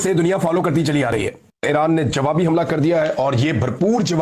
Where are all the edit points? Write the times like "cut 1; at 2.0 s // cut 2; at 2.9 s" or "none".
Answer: cut 1; at 1.6 s